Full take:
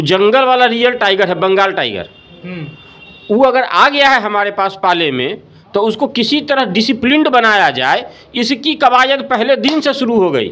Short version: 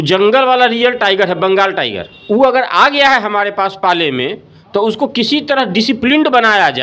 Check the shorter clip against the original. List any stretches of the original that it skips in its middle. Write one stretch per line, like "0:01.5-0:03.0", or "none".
0:02.1-0:03.1